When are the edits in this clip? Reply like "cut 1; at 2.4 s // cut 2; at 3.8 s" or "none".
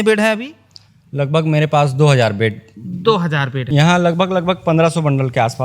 cut 1; at 3.6 s